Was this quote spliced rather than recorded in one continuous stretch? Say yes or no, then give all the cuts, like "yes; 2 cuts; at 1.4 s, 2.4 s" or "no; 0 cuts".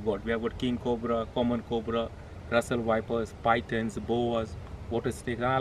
no; 0 cuts